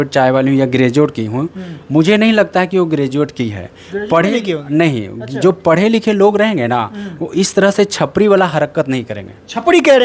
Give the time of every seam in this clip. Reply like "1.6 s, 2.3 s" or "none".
none